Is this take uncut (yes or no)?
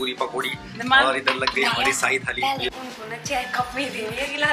no